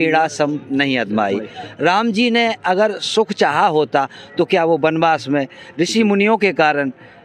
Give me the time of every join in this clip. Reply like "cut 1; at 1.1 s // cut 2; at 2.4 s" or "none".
none